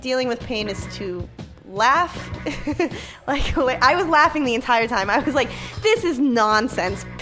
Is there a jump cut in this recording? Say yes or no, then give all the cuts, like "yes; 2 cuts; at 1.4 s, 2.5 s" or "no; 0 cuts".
no; 0 cuts